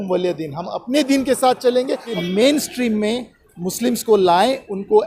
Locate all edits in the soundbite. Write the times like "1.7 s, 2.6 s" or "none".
2.1 s